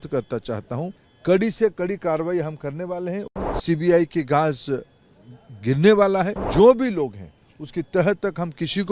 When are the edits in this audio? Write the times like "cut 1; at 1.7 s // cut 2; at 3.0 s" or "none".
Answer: cut 1; at 1.1 s // cut 2; at 3.3 s // cut 3; at 6.4 s